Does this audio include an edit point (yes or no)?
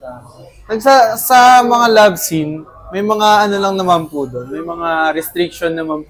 no